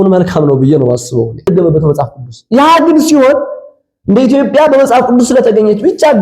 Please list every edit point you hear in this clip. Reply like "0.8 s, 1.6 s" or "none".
1.5 s